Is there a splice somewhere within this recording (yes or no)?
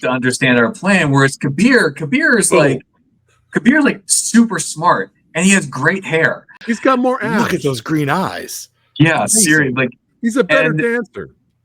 yes